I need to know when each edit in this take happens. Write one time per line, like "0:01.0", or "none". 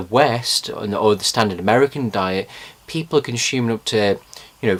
none